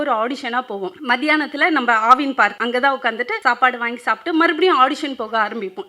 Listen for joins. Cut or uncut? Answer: cut